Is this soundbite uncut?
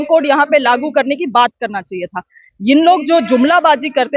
yes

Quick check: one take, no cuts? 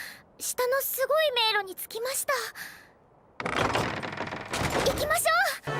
yes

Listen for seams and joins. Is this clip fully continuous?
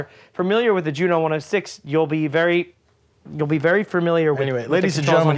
yes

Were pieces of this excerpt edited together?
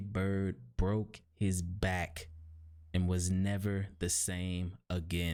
no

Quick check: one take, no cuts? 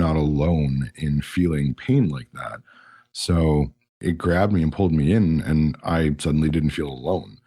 no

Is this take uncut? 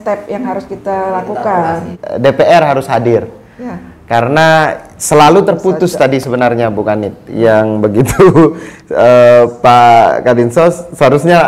no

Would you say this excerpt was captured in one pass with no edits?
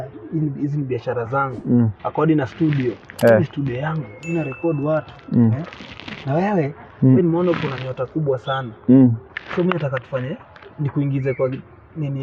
yes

